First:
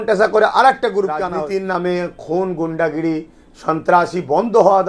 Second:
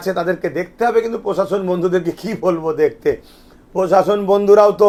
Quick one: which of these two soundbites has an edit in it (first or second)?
first